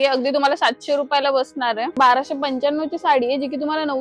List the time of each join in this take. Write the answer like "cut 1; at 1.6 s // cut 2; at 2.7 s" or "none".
cut 1; at 1.9 s